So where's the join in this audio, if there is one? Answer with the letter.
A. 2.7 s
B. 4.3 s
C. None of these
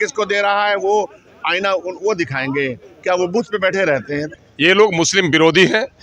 B